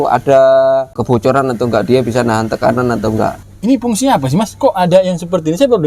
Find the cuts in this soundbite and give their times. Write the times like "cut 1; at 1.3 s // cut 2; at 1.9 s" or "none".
cut 1; at 1.0 s // cut 2; at 3.5 s